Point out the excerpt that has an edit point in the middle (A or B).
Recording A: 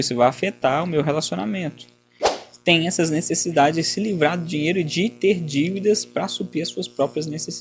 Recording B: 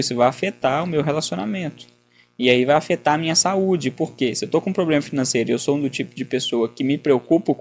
A